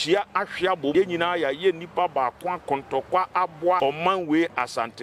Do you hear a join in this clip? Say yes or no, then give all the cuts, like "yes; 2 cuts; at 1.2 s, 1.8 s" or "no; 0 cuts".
yes; 2 cuts; at 0.9 s, 3.8 s